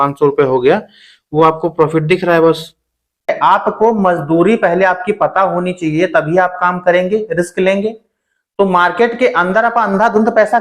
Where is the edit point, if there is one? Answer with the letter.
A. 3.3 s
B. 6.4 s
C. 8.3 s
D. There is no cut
A